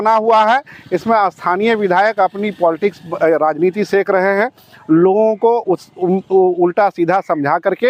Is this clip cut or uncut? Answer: uncut